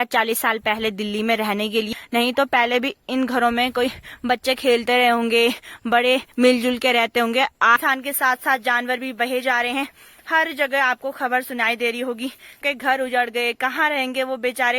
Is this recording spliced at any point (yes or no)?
yes